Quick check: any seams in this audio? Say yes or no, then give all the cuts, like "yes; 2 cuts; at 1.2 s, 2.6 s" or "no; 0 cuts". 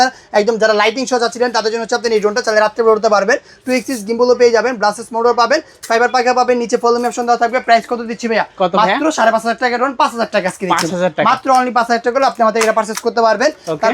no; 0 cuts